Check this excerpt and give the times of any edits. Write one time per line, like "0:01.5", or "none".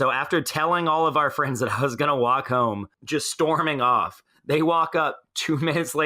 0:02.9